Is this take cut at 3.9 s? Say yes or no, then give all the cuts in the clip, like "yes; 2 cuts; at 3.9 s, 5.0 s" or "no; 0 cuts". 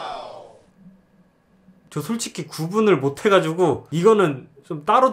no; 0 cuts